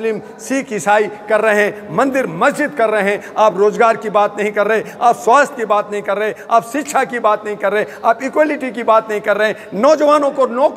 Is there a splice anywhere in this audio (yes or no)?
no